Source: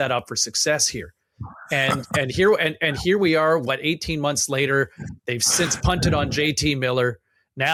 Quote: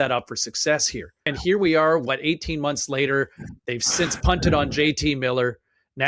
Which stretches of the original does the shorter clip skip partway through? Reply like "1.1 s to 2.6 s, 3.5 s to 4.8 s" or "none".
1.3 s to 2.9 s